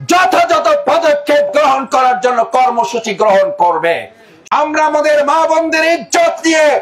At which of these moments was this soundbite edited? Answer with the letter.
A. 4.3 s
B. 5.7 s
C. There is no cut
A